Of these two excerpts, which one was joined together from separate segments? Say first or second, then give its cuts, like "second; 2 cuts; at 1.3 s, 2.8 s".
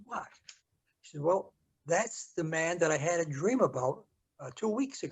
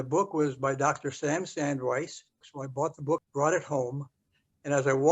second; 2 cuts; at 2.6 s, 3.3 s